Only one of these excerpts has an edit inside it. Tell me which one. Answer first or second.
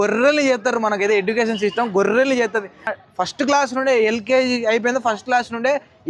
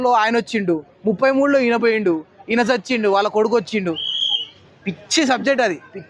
first